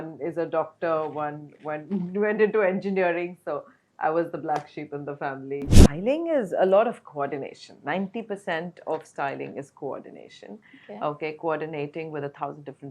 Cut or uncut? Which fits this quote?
cut